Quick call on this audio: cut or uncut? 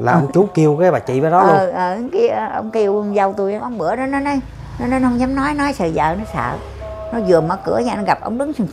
cut